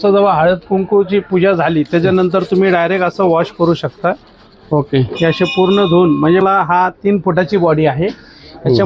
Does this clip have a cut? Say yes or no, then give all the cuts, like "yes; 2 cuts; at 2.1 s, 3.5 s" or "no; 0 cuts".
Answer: yes; 1 cut; at 6.4 s